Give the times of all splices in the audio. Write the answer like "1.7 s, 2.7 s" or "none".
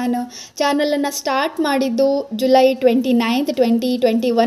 none